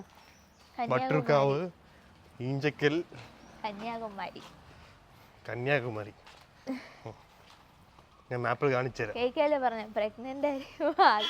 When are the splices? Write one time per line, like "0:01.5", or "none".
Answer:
none